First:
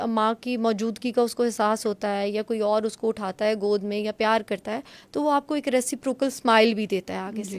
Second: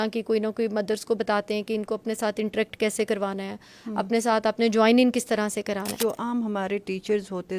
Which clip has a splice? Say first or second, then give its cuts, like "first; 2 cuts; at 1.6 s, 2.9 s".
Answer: second; 1 cut; at 5.9 s